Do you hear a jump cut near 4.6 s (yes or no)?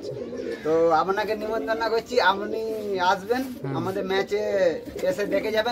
no